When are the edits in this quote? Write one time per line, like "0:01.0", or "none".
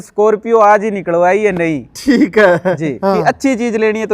0:03.0

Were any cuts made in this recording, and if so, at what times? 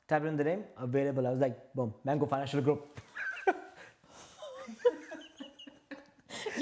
none

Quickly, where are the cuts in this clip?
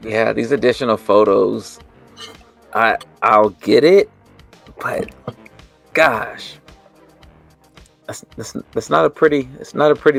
none

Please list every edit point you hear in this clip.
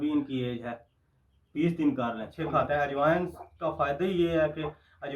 0:02.3

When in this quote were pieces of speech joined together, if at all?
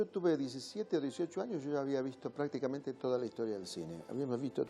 0:02.7

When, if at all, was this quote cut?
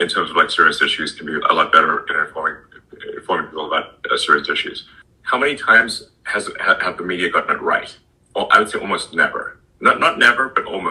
none

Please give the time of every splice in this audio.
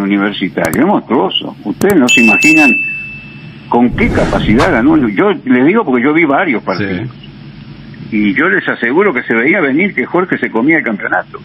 none

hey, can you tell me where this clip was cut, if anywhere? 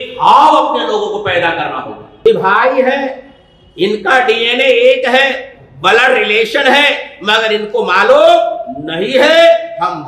0:02.2

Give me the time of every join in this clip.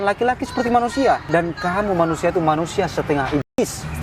0:01.2

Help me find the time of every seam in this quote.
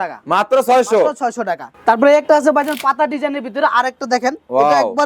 0:01.7

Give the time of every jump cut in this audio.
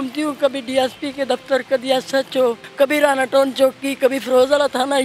0:02.6

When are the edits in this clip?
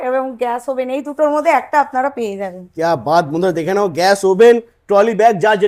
none

